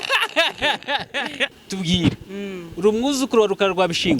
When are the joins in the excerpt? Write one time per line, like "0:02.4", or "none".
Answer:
0:01.6